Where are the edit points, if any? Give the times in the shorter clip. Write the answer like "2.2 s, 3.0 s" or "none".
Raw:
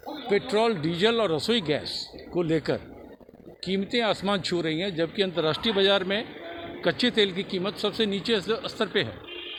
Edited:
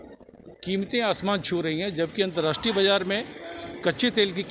none